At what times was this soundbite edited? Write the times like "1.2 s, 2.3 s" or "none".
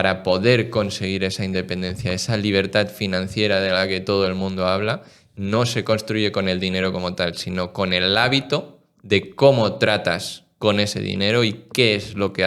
none